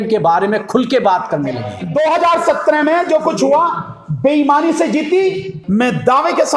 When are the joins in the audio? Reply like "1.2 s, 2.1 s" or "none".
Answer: 1.7 s, 5.5 s